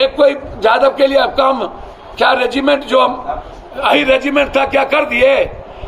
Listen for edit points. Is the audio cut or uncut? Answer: uncut